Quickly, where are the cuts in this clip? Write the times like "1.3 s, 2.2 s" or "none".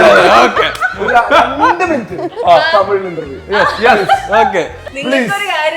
4.8 s